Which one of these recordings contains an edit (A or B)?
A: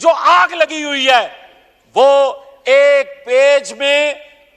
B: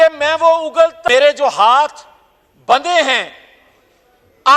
B